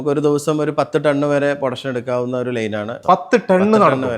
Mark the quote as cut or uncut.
cut